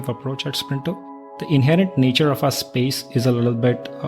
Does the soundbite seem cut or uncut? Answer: cut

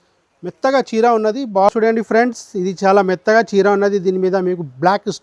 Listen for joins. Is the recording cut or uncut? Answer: cut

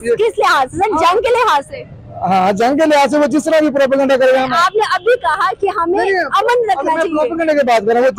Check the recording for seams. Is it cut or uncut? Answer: uncut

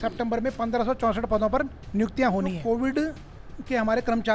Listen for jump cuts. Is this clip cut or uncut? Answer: cut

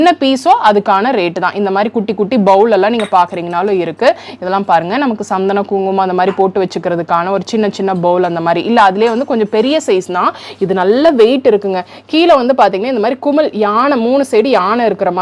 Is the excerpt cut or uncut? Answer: uncut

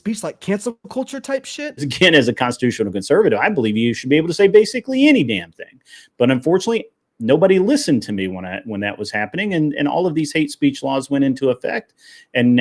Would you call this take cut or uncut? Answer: cut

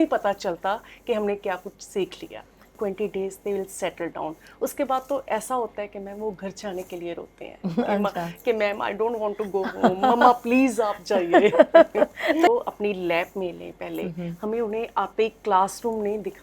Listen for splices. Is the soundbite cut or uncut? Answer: cut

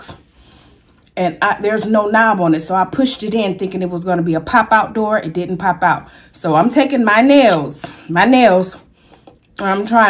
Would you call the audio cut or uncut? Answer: uncut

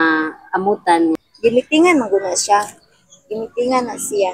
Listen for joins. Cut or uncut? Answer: cut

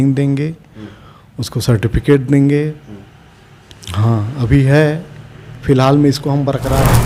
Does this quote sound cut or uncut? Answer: uncut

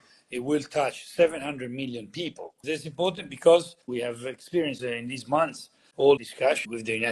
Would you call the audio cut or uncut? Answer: cut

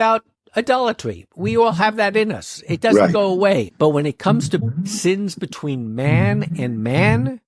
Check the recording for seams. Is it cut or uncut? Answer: cut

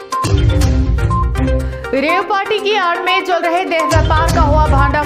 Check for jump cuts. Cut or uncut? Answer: cut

